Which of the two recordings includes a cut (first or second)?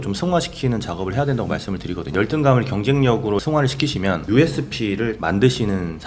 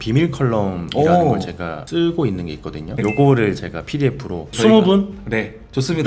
first